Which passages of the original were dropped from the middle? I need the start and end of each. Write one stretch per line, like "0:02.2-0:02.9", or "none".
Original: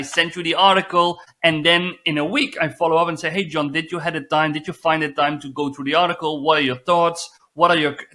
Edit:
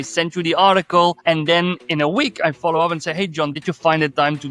0:01.2-0:01.3
0:03.7-0:04.6